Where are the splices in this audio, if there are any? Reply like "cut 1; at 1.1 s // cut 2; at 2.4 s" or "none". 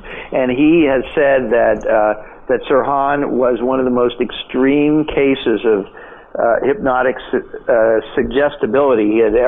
none